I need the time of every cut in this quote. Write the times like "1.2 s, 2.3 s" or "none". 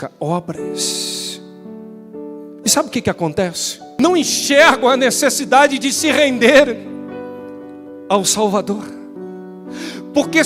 3.9 s